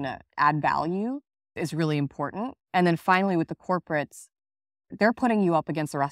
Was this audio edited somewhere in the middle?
yes; 1 cut; at 2.6 s

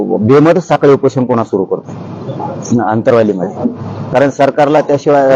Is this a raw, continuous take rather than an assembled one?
yes; 0 cuts

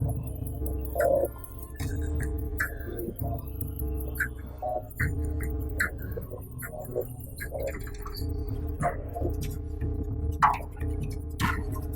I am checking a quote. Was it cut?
no; 0 cuts

